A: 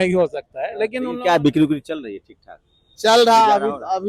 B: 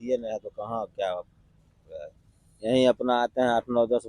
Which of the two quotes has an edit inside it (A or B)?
A